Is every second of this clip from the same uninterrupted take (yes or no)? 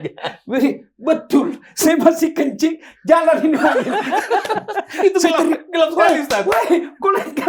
yes